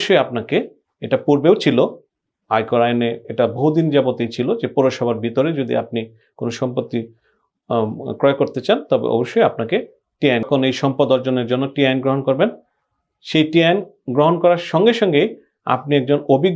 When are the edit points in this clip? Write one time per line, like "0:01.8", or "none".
0:10.5